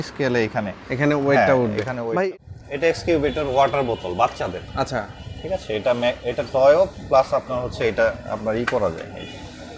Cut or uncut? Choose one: cut